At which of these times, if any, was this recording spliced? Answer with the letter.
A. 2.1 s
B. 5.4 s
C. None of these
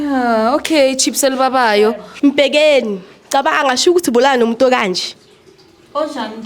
A